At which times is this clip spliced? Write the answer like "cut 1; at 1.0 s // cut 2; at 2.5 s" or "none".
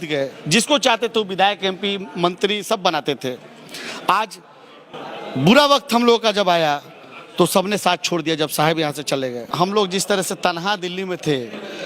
cut 1; at 9.4 s